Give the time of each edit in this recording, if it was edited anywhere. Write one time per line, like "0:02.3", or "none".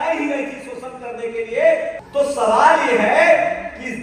0:02.0